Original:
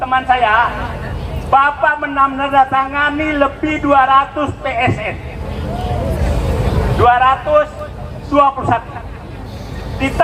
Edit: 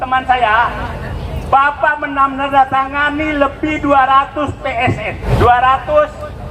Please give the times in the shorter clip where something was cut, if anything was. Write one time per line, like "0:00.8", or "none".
0:05.2